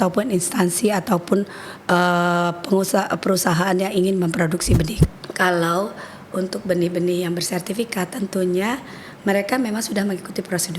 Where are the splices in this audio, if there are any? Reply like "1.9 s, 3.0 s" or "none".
5.0 s